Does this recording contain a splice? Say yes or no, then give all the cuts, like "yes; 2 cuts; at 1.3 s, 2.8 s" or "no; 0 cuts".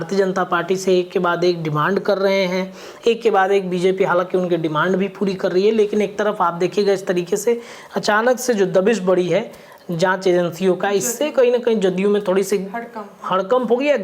no; 0 cuts